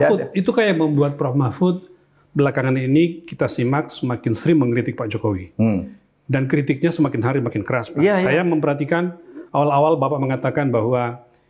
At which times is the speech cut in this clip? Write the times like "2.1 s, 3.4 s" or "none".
none